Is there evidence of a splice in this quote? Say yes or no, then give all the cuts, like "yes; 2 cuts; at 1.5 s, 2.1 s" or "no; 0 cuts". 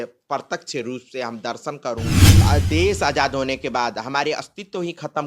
yes; 1 cut; at 2.4 s